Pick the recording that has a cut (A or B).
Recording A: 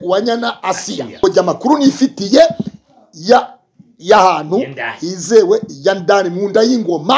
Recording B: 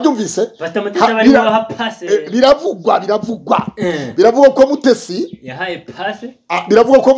A